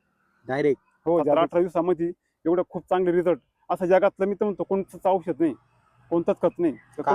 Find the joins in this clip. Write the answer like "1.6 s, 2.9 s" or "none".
1.4 s

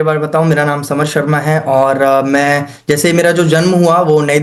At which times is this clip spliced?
none

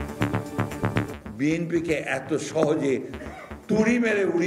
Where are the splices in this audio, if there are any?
1.1 s

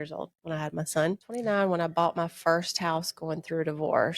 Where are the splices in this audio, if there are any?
1.4 s

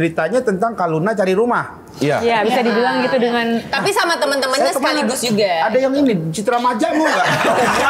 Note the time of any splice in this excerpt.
none

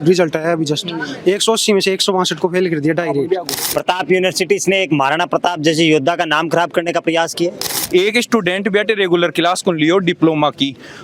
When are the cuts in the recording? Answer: 3.6 s, 7.8 s

